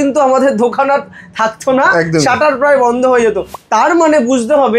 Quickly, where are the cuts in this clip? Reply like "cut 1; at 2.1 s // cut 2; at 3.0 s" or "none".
cut 1; at 3.5 s